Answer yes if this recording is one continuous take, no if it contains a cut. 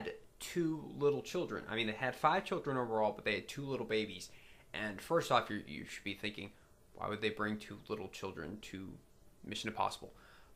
yes